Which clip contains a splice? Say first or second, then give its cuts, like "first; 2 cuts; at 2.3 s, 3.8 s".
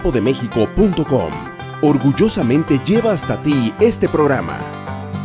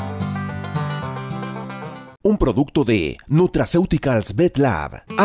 second; 1 cut; at 2.0 s